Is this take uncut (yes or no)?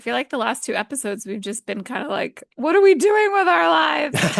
yes